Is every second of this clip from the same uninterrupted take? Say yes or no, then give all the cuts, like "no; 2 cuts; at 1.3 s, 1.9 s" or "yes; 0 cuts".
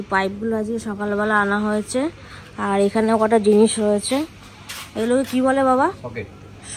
yes; 0 cuts